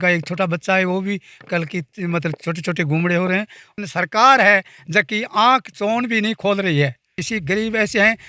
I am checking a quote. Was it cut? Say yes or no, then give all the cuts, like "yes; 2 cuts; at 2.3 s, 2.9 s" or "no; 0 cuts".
yes; 2 cuts; at 3.6 s, 7.2 s